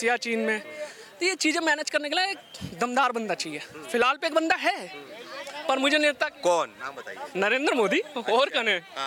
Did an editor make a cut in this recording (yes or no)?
no